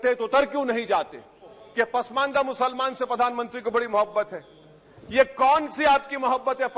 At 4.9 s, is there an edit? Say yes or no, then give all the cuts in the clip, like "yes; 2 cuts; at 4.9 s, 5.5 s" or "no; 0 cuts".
no; 1 cut; at 1.6 s